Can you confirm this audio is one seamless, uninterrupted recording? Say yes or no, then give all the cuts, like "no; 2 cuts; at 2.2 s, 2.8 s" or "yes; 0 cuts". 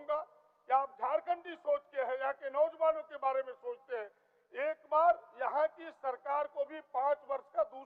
yes; 0 cuts